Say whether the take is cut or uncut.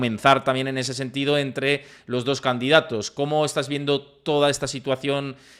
uncut